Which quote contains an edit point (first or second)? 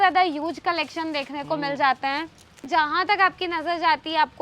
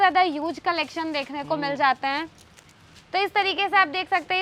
first